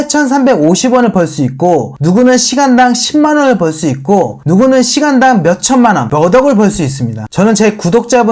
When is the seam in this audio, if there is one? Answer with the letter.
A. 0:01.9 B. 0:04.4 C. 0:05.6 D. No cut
B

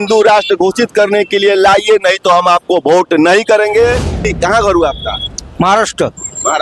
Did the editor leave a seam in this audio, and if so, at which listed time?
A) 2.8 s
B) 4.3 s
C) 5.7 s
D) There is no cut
B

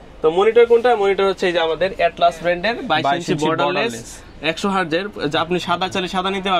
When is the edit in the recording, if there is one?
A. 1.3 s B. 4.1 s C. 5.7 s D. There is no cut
D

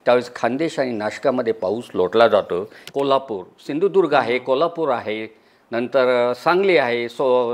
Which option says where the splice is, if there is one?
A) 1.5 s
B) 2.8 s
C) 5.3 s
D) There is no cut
B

